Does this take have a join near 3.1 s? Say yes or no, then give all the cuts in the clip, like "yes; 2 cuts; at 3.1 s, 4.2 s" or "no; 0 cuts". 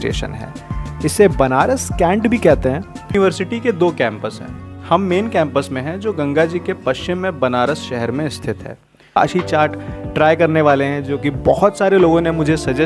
yes; 2 cuts; at 3.1 s, 9.2 s